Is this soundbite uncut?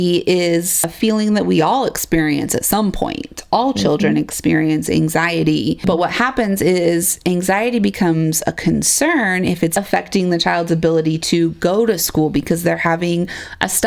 no; 3 cuts; at 0.9 s, 5.8 s, 9.7 s

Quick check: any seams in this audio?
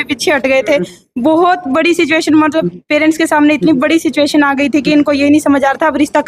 no; 0 cuts

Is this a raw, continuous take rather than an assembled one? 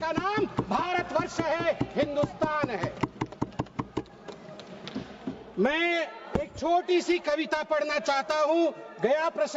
yes; 0 cuts

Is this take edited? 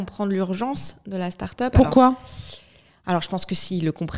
no; 0 cuts

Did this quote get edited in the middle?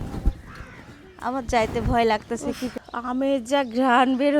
yes; 1 cut; at 2.8 s

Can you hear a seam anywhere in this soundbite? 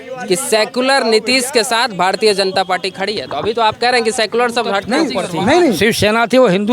yes; 1 cut; at 5.8 s

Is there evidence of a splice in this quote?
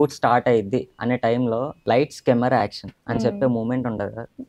yes; 1 cut; at 1.7 s

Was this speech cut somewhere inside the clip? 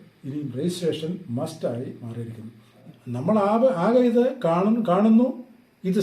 yes; 1 cut; at 2.8 s

